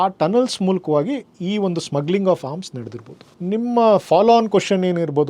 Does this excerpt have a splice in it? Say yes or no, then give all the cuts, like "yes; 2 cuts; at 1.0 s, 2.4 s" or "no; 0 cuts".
no; 0 cuts